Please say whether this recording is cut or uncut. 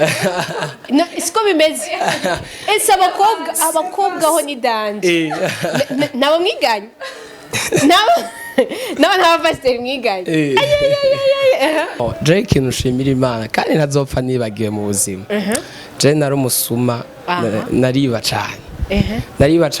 cut